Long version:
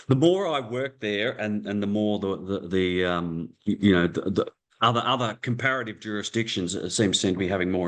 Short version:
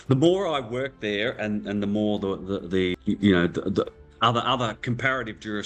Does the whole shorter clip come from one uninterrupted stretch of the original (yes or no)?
no